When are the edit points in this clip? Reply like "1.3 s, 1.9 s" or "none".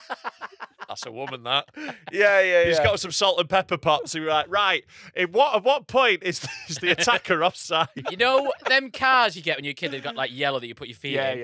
7.9 s